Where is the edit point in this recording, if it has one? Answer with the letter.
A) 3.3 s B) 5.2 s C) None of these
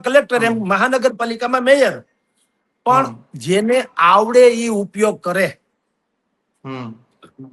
C